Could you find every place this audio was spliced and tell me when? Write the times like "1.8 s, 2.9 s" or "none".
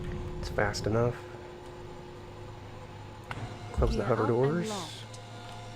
none